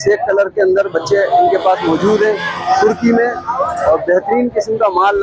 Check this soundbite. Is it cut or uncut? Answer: uncut